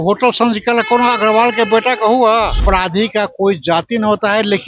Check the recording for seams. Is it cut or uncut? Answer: cut